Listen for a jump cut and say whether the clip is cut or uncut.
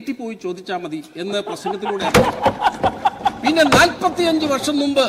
uncut